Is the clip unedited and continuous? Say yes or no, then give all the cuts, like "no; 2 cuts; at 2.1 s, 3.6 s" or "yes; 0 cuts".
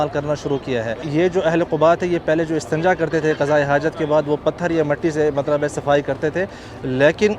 no; 1 cut; at 1.0 s